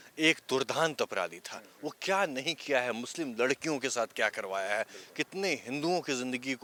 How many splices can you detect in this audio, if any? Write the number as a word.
zero